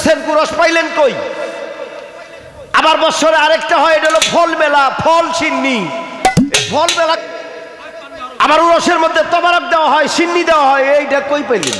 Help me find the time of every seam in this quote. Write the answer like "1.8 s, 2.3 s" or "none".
7.2 s